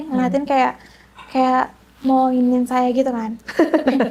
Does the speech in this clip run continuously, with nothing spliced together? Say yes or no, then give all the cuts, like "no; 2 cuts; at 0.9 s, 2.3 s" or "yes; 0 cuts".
yes; 0 cuts